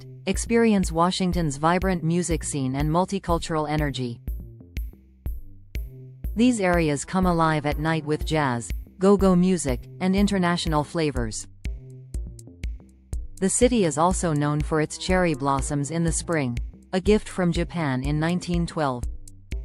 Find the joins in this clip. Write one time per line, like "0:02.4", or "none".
0:11.8
0:13.3